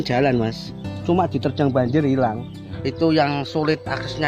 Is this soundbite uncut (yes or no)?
no